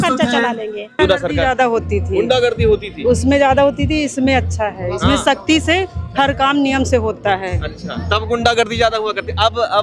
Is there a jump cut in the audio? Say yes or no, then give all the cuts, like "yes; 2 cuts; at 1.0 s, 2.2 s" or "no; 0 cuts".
yes; 1 cut; at 1.0 s